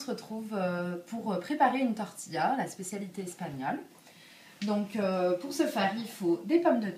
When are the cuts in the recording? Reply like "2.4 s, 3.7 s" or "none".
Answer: 1.7 s